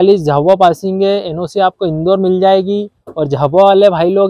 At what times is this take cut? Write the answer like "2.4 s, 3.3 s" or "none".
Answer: none